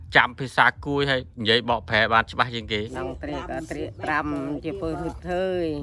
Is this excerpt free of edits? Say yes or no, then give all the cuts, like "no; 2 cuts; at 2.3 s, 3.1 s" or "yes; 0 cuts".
no; 1 cut; at 2.9 s